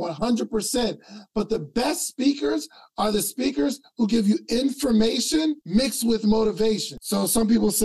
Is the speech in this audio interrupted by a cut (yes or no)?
yes